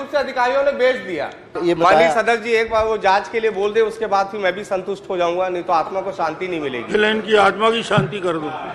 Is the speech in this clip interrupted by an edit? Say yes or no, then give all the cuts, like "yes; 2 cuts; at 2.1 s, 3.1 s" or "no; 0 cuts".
yes; 1 cut; at 1.5 s